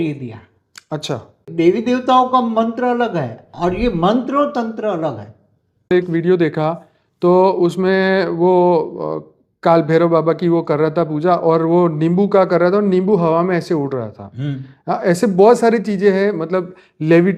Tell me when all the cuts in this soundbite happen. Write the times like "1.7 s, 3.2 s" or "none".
1.5 s, 5.9 s